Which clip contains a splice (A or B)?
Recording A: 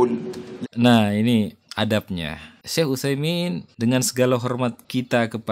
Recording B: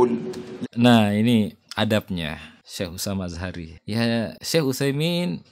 A